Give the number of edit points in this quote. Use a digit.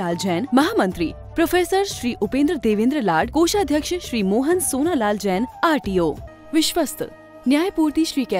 1